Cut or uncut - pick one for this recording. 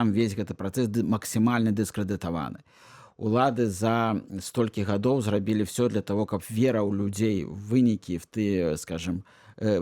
uncut